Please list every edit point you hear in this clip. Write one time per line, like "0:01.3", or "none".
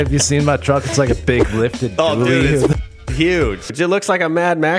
0:03.7